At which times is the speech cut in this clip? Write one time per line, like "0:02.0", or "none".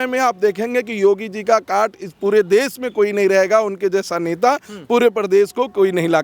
none